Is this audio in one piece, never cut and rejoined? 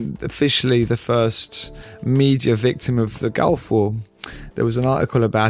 yes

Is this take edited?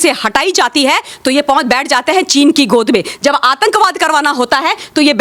no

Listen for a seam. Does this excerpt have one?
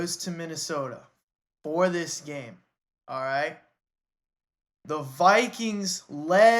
no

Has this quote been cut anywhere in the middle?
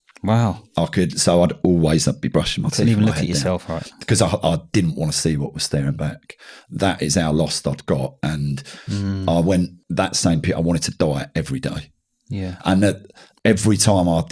yes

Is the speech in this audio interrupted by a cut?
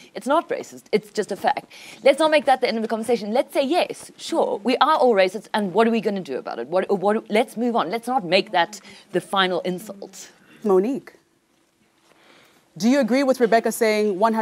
no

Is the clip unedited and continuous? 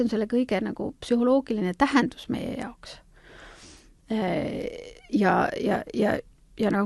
yes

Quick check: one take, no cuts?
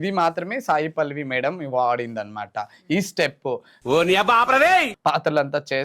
no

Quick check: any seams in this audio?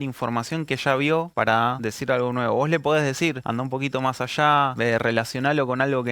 yes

